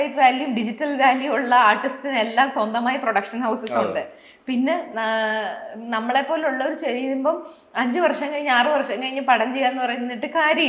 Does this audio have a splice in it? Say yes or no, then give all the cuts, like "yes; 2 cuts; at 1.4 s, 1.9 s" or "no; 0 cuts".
no; 0 cuts